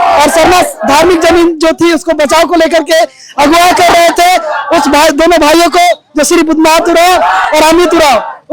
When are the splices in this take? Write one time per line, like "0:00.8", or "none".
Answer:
none